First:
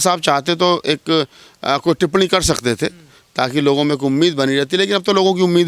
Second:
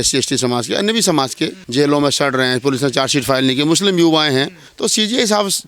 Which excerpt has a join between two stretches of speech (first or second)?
second